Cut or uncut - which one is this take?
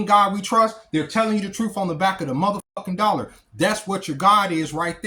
uncut